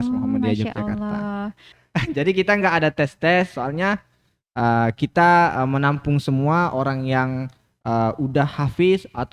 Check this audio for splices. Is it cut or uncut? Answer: cut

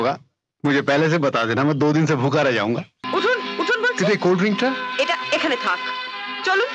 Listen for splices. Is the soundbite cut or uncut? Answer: cut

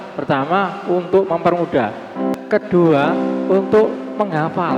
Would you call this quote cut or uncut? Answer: cut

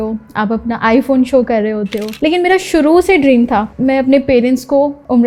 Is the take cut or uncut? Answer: uncut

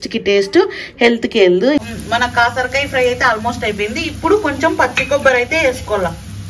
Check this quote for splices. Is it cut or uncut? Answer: cut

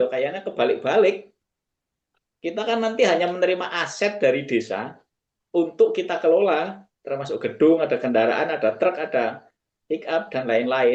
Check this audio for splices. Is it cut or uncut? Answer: uncut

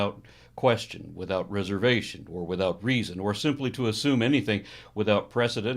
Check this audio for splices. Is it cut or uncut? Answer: cut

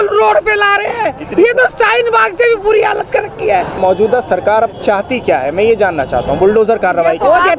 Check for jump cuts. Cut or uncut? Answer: cut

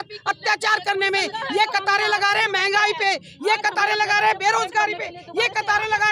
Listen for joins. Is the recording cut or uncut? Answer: uncut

